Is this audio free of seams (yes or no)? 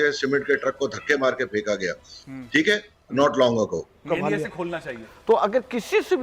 no